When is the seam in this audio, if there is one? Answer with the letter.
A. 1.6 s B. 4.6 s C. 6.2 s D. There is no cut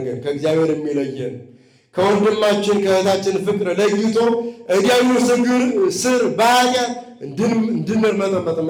D